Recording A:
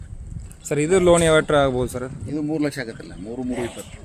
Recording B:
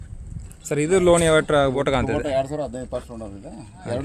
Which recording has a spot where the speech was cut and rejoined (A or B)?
B